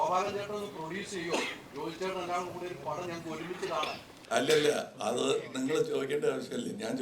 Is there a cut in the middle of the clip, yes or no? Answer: yes